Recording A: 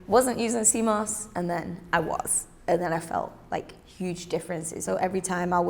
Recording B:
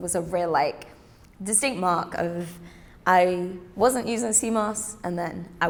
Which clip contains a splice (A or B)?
A